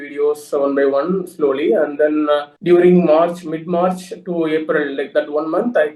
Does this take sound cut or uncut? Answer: cut